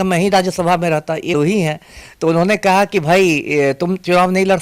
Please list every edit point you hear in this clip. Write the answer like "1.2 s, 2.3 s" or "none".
1.3 s